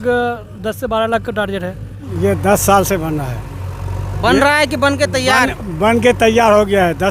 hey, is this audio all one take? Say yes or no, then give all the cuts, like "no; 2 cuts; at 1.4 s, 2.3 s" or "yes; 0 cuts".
no; 1 cut; at 2.1 s